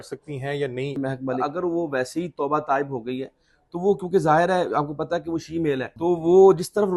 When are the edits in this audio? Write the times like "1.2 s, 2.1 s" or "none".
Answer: 1.2 s, 5.9 s